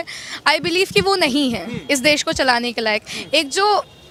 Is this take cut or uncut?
uncut